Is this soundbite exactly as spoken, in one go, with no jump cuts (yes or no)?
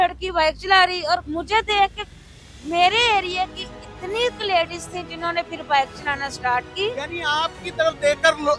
no